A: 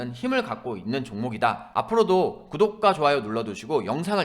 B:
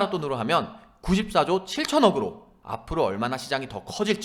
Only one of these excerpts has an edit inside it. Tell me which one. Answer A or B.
A